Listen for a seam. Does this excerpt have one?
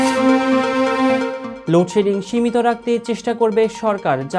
no; 0 cuts

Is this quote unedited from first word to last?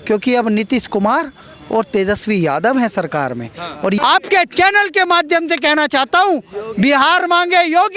no; 1 cut; at 4.0 s

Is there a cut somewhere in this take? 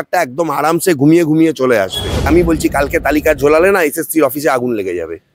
yes; 1 cut; at 2.3 s

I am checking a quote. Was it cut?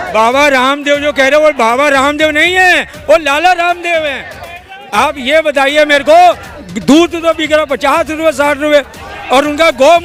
no; 0 cuts

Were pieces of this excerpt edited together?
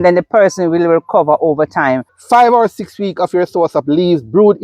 yes; 1 cut; at 2.1 s

